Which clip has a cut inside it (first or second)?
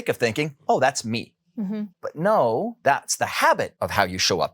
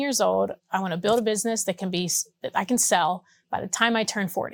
first